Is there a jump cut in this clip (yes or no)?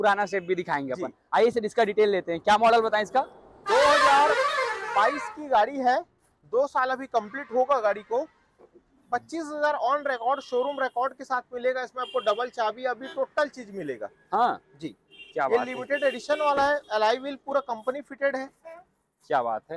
no